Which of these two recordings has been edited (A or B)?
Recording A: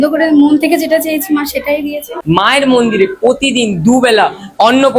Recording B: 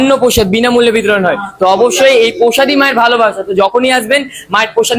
A